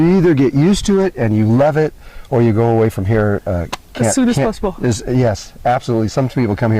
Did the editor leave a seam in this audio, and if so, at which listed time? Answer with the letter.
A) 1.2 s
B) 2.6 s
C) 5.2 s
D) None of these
B